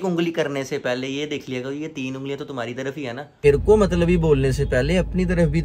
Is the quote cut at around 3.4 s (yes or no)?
yes